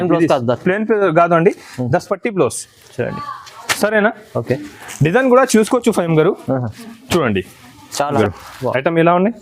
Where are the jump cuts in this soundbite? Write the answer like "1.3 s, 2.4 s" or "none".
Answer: 8.2 s